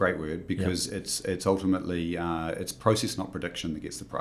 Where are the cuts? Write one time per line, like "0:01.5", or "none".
none